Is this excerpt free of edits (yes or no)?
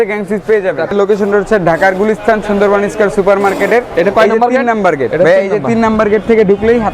no